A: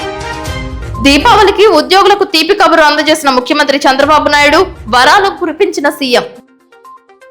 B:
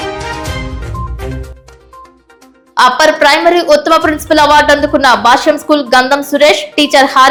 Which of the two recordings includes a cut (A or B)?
A